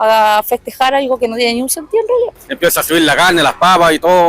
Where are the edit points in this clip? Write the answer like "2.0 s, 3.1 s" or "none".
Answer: 2.4 s